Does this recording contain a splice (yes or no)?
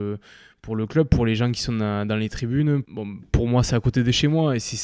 yes